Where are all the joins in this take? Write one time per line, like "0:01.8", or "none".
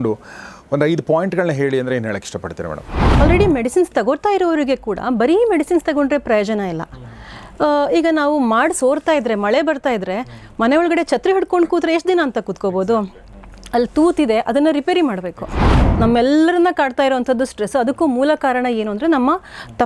0:03.2
0:15.8